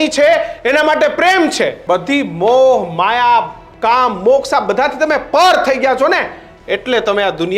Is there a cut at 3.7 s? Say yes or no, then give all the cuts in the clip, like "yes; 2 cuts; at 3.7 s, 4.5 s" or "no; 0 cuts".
no; 1 cut; at 1.8 s